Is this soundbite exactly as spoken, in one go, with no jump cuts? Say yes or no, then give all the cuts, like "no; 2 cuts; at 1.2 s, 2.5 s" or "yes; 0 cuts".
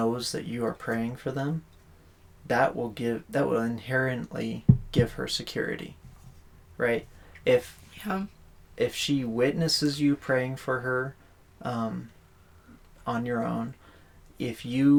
yes; 0 cuts